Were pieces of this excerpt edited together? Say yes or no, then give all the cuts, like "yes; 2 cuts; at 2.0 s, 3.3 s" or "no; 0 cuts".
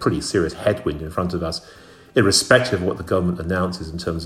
no; 0 cuts